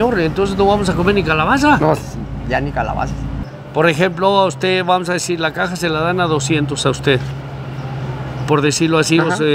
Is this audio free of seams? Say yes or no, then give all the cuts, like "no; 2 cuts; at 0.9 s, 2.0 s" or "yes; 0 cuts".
yes; 0 cuts